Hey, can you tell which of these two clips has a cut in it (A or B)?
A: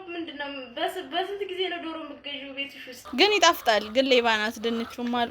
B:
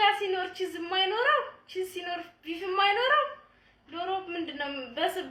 A